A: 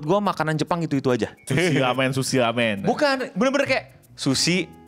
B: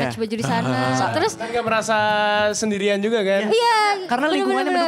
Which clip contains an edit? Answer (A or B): A